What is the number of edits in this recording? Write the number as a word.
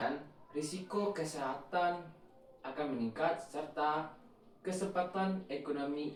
zero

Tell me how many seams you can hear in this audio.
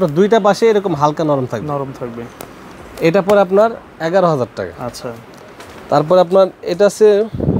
zero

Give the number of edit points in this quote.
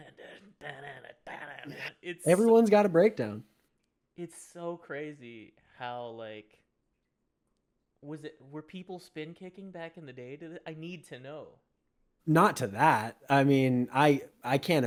zero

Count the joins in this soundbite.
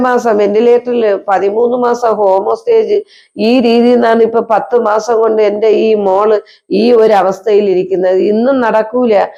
zero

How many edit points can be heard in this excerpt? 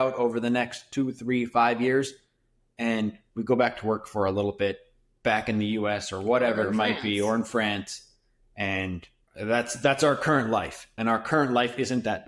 two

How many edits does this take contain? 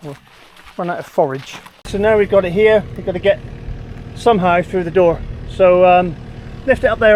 one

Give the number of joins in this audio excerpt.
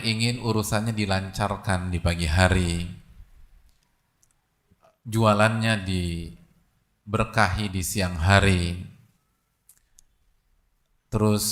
one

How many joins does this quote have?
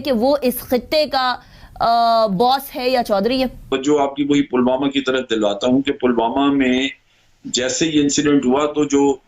one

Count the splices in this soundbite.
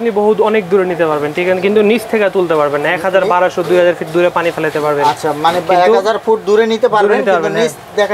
zero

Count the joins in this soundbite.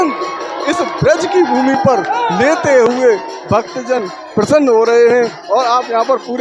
zero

